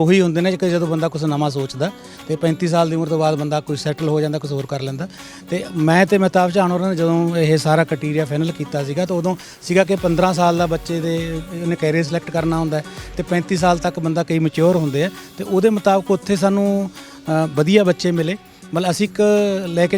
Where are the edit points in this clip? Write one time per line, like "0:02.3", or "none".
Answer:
none